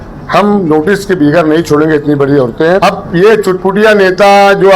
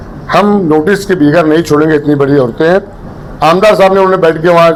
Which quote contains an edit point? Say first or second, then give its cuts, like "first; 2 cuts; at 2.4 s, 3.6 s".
first; 1 cut; at 2.8 s